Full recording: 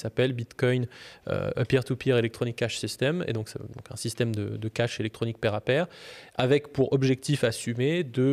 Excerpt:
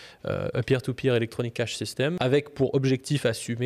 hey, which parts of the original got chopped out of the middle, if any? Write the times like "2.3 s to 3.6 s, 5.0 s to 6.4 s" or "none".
3.2 s to 6.3 s